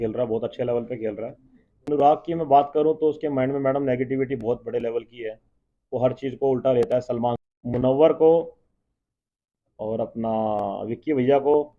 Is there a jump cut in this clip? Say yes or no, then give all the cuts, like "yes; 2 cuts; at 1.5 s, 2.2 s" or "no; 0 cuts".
yes; 2 cuts; at 1.9 s, 7.4 s